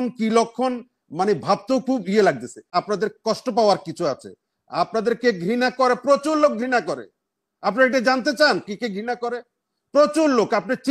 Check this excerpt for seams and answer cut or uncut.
cut